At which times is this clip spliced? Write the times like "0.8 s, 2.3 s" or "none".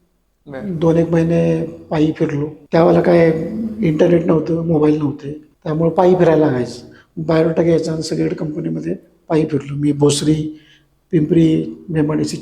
none